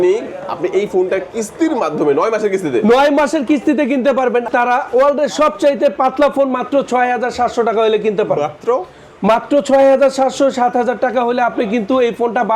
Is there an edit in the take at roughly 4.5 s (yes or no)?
yes